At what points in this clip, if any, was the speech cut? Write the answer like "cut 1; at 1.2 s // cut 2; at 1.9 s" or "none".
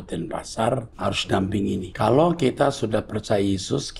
cut 1; at 0.9 s // cut 2; at 1.9 s

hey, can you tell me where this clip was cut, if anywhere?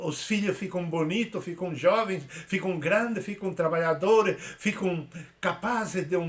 none

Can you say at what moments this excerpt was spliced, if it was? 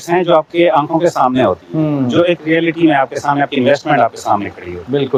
none

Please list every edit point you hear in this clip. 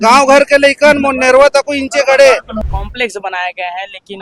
cut 1; at 2.6 s

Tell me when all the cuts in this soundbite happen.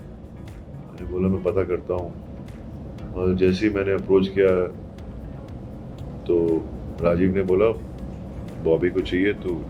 none

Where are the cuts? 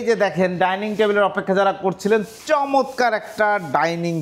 none

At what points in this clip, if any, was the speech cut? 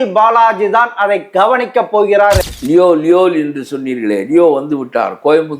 cut 1; at 2.5 s

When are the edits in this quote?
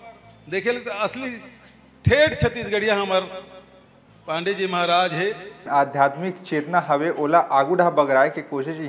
cut 1; at 5.7 s

